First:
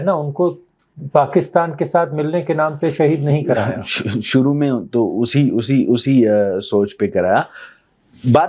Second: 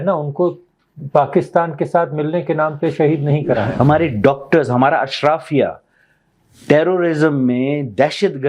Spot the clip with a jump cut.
second; 1 cut; at 3.7 s

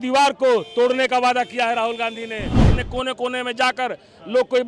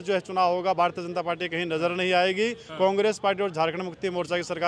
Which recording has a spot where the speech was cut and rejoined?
first; 1 cut; at 2.7 s

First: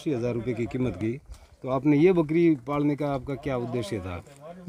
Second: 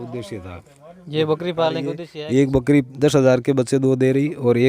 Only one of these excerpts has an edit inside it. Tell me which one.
second; 1 cut; at 2.1 s

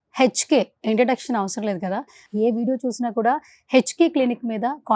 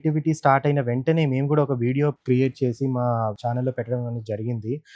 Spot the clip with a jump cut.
first; 1 cut; at 2.2 s

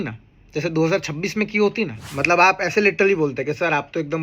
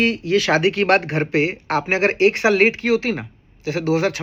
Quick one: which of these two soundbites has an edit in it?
first; 1 cut; at 2.0 s

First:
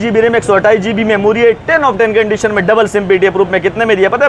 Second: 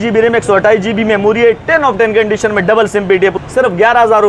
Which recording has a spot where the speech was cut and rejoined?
second; 1 cut; at 3.3 s

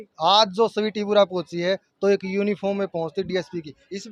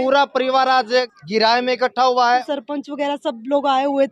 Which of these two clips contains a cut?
second; 2 cuts; at 1.2 s, 2.4 s

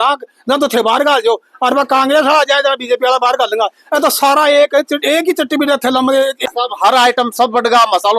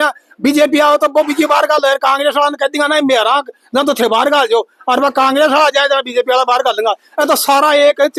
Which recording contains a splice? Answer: first; 1 cut; at 6.5 s

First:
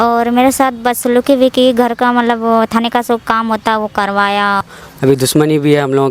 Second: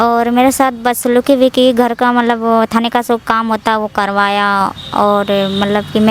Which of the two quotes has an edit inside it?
first; 1 cut; at 4.8 s

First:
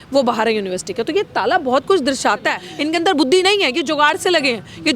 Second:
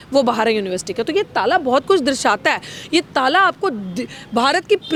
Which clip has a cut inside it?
first; 1 cut; at 2.7 s

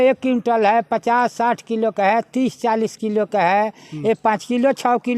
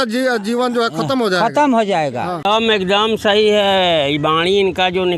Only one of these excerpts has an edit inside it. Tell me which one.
second; 1 cut; at 2.5 s

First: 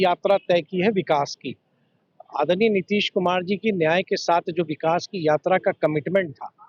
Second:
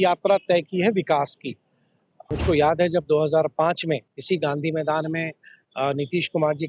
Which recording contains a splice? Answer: second; 1 cut; at 2.3 s

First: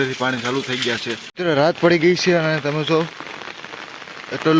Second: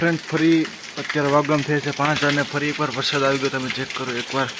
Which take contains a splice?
first; 1 cut; at 1.3 s

